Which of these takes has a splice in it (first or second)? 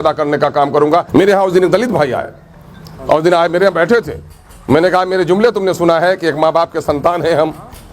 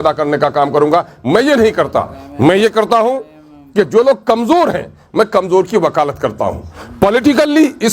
first